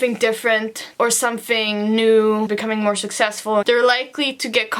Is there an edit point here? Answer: yes; 2 cuts; at 2.5 s, 3.6 s

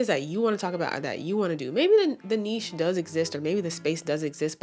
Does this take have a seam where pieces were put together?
no; 0 cuts

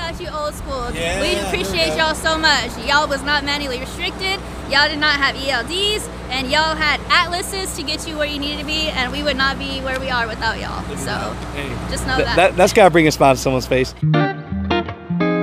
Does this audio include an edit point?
yes; 1 cut; at 14.0 s

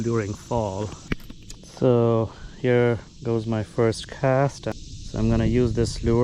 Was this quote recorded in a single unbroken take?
no; 1 cut; at 1.0 s

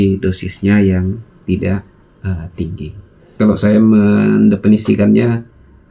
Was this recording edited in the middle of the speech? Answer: yes; 1 cut; at 3.4 s

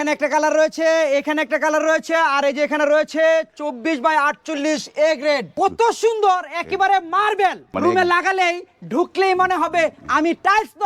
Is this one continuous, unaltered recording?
no; 2 cuts; at 5.5 s, 7.7 s

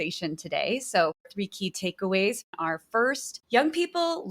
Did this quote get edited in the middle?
yes; 2 cuts; at 1.2 s, 2.4 s

